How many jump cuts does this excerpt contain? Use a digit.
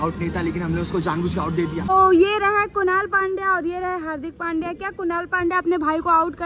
1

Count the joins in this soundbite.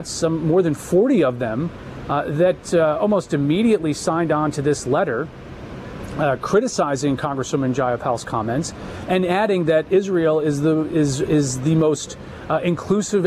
0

